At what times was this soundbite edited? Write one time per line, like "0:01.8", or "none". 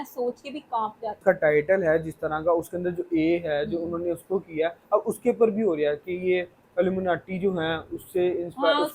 0:01.2

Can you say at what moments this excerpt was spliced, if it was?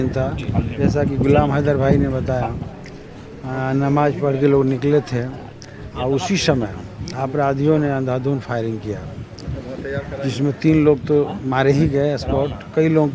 none

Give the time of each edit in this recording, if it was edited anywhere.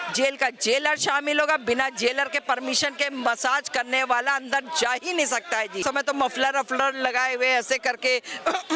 0:05.8

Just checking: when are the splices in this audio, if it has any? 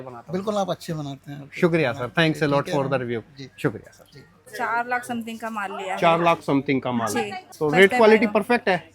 0:04.4
0:07.4

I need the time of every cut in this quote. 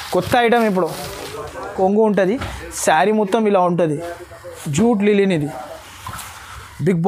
0:01.8

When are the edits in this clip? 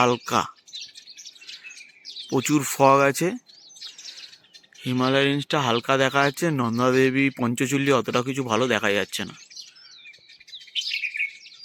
none

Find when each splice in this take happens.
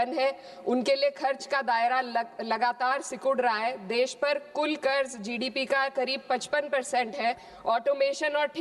0:07.5

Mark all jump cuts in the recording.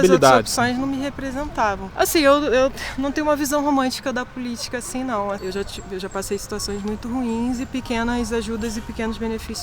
0:01.9
0:05.4

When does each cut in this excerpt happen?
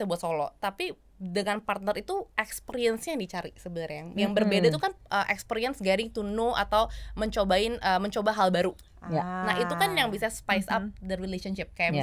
none

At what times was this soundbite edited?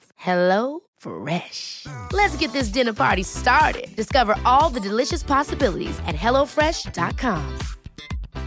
none

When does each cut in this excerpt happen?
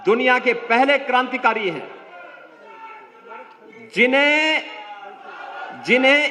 none

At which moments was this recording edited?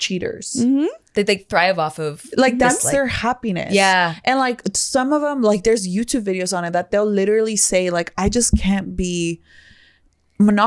none

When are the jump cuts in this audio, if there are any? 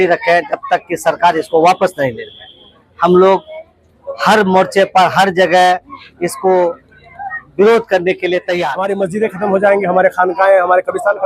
0:08.8

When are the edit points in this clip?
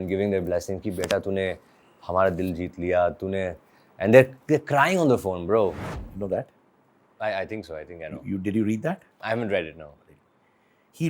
0:05.8

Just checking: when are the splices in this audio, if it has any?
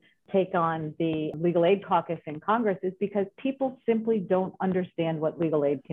0:01.3

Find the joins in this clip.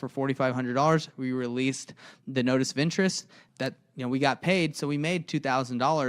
0:03.4

